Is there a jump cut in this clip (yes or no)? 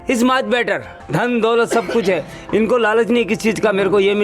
yes